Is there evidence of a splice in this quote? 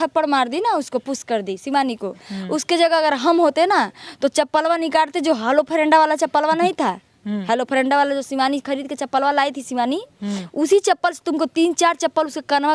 no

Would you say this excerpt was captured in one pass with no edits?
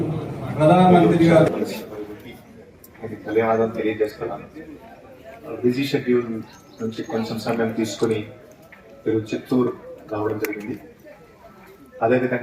no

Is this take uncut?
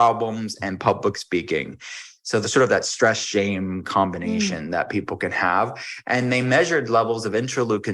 yes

